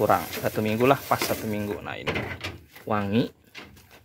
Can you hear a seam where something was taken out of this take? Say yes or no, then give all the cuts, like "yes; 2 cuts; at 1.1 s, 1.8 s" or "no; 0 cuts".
yes; 1 cut; at 2.1 s